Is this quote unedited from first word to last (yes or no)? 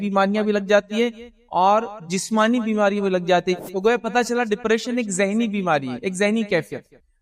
no